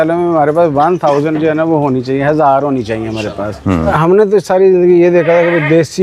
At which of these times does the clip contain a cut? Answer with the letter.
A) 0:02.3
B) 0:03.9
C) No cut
B